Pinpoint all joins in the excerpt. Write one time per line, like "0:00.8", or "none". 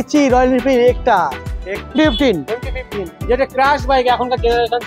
0:01.9